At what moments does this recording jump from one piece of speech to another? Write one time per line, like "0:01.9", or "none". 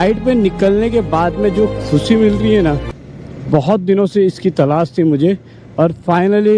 none